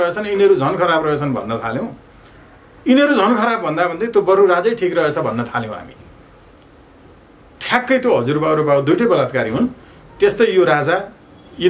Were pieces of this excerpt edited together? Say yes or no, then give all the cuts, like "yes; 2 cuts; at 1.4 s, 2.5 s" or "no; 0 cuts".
no; 0 cuts